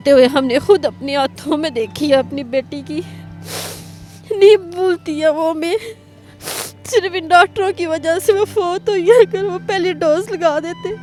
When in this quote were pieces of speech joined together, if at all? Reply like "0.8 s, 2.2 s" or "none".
none